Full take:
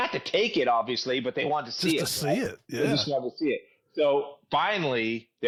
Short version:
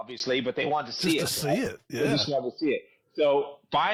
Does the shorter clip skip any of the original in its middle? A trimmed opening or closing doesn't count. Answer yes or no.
no